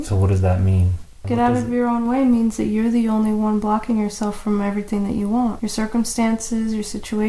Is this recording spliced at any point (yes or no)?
yes